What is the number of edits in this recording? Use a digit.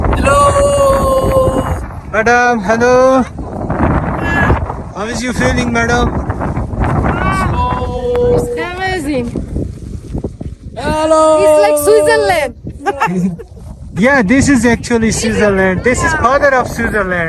0